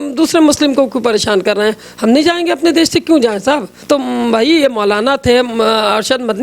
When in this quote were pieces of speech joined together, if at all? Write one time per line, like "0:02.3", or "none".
0:03.7